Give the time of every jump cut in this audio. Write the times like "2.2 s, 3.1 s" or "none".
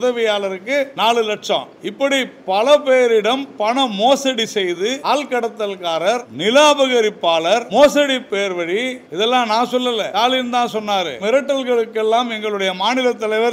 0.9 s, 1.8 s, 5.0 s, 6.3 s, 7.7 s, 9.0 s, 10.1 s, 11.2 s

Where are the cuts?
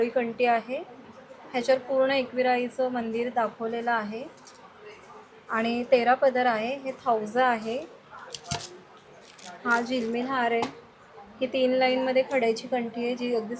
none

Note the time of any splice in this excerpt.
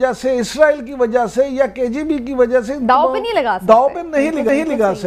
none

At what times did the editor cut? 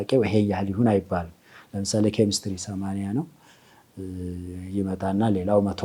none

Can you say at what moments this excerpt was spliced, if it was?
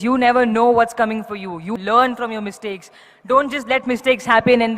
1.7 s

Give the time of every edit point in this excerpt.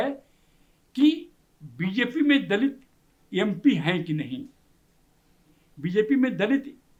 none

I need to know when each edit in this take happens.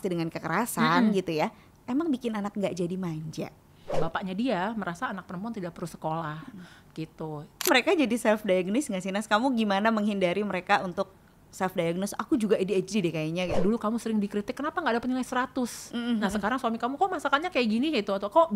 3.9 s, 7.7 s, 13.6 s

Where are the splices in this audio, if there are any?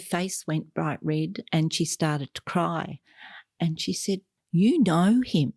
4.3 s

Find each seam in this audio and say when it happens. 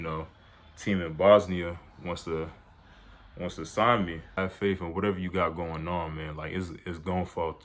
4.3 s

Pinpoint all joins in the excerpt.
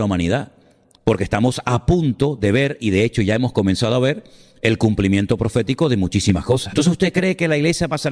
6.7 s

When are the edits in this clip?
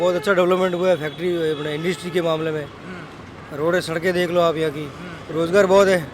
5.2 s

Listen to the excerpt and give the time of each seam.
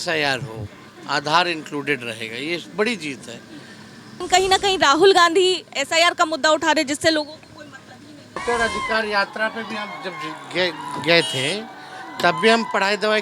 4.1 s, 8.4 s

